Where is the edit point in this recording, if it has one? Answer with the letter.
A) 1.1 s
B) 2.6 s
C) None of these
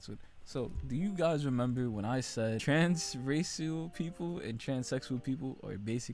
B